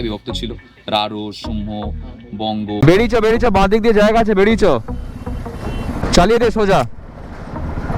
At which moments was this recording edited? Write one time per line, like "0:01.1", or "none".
0:02.8